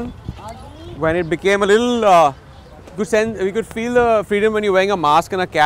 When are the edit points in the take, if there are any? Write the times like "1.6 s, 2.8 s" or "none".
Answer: none